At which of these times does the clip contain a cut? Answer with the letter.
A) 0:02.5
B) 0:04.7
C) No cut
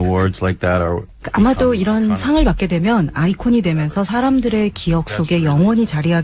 A